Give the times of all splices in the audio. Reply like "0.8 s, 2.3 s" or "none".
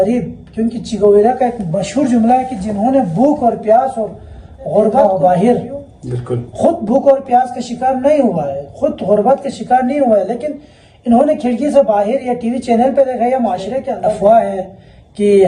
5.0 s, 14.0 s